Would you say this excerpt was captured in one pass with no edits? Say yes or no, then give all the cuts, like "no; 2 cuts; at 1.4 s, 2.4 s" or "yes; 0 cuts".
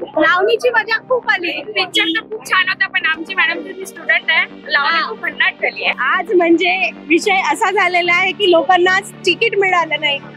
no; 1 cut; at 6.0 s